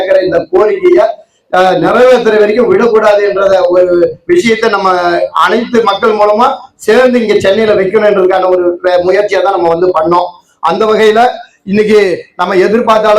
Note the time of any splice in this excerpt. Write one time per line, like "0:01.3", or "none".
none